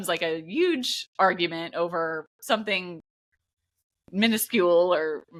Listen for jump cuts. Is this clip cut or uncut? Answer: uncut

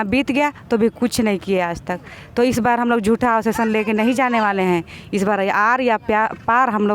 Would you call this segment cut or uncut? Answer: uncut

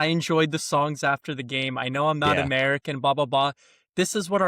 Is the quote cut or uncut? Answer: uncut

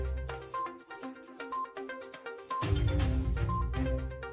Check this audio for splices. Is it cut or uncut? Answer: cut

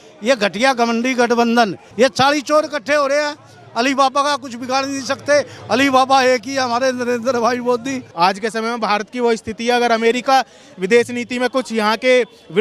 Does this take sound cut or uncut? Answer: cut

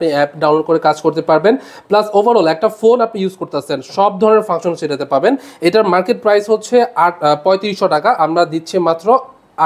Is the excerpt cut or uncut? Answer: uncut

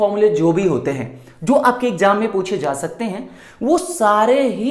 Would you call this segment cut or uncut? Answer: uncut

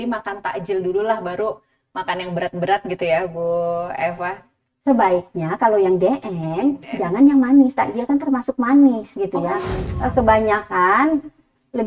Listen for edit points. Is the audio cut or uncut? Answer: cut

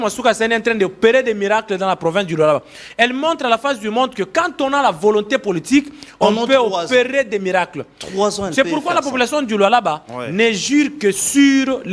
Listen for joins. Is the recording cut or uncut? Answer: uncut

